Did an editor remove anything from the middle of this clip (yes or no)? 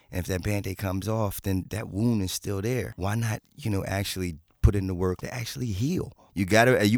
yes